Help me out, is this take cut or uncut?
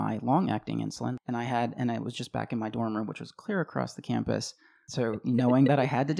cut